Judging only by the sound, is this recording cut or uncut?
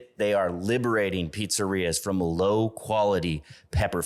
uncut